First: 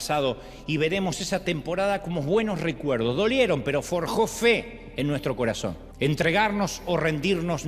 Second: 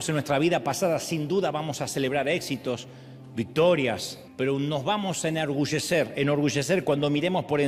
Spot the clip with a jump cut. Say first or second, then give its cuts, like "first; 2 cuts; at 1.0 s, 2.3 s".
first; 1 cut; at 5.9 s